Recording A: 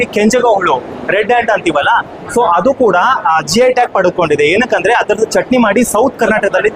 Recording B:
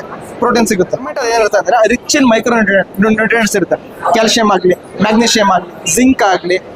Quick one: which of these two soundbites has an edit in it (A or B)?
B